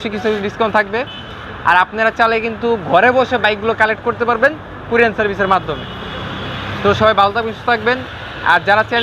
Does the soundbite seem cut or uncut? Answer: uncut